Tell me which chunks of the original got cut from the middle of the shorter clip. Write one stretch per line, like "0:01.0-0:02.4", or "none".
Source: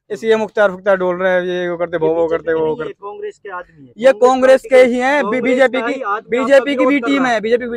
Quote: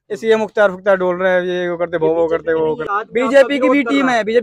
0:02.9-0:06.1